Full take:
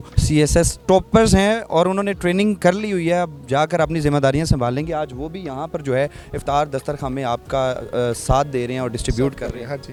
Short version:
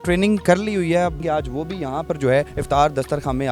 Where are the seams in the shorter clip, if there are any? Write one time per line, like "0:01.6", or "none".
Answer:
0:01.2
0:02.6